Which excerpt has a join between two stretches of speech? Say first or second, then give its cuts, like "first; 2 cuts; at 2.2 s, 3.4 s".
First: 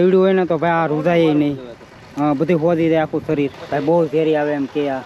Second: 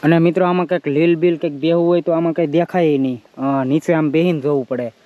first; 1 cut; at 3.6 s